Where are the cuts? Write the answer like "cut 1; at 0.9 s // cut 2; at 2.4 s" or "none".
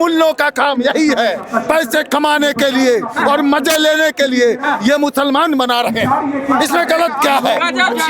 none